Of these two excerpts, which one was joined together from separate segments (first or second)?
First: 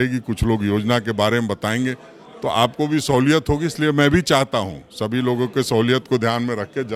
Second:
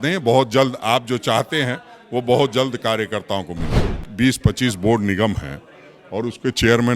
second